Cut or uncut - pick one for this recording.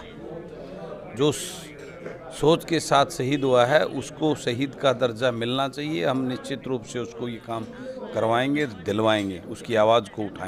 uncut